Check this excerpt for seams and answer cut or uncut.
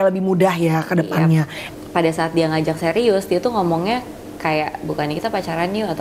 cut